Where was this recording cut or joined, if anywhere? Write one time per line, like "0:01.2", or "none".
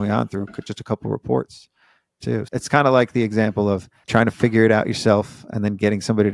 none